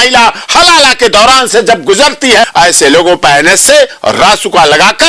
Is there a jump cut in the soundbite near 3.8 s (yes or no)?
no